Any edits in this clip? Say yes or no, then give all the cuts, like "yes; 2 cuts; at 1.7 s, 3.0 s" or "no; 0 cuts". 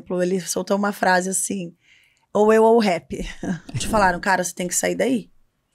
yes; 1 cut; at 3.8 s